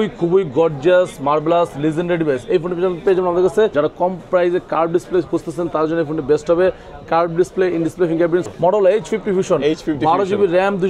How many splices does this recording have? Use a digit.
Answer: 2